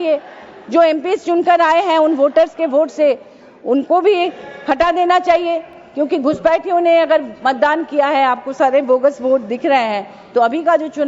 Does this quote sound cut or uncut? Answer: uncut